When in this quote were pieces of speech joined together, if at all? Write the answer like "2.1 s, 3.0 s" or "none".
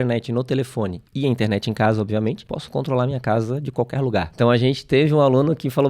1.0 s, 2.5 s, 4.3 s